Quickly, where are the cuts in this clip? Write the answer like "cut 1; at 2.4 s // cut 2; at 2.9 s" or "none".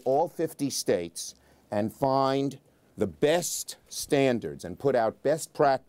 none